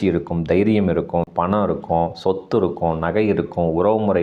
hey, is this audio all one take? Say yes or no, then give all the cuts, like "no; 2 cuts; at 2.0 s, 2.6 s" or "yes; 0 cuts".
no; 1 cut; at 1.3 s